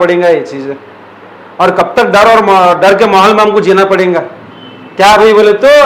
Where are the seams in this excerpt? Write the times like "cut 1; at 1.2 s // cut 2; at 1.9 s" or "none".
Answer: none